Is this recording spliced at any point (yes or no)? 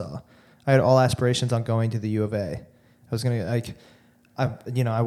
no